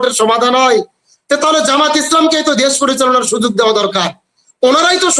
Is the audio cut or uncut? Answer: uncut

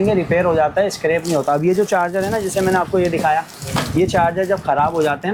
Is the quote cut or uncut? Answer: uncut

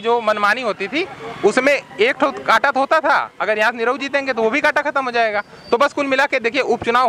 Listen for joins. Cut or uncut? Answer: uncut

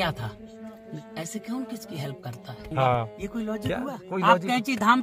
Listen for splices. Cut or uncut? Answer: cut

